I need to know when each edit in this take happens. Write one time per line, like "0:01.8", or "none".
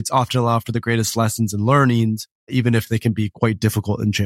0:02.5
0:03.3